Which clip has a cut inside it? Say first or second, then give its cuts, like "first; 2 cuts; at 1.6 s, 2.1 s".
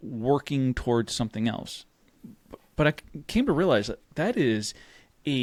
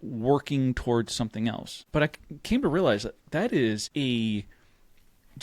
second; 2 cuts; at 1.7 s, 3.9 s